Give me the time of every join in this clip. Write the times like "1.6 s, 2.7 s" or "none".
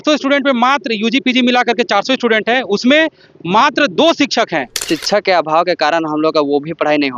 4.9 s